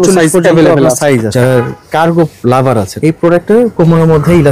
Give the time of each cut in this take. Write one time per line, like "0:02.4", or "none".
0:01.3
0:02.9